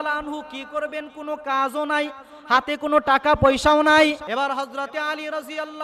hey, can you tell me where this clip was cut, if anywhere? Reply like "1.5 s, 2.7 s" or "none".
4.2 s

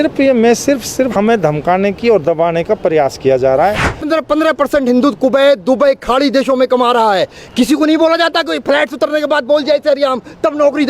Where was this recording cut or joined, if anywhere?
1.1 s, 4.1 s

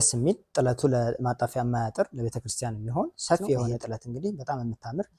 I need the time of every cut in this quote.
3.8 s

